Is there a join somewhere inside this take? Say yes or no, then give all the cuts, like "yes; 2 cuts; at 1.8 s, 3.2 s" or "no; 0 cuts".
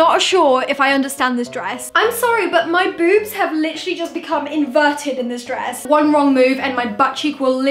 yes; 2 cuts; at 1.8 s, 5.8 s